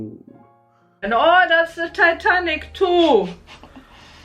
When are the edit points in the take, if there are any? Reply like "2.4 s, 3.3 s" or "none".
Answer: 1.1 s